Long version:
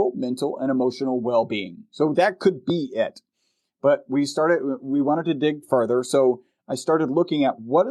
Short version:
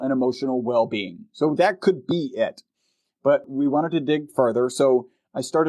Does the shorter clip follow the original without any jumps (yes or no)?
no